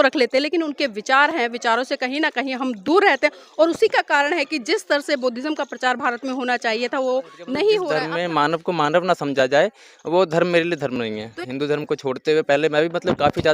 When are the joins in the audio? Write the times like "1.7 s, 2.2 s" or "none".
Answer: 8.0 s, 11.3 s